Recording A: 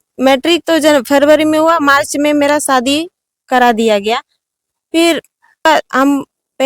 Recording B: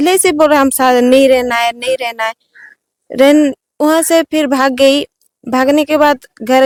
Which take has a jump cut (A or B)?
A